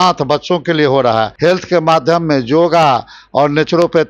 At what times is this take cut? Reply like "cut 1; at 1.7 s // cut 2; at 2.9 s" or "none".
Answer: cut 1; at 1.3 s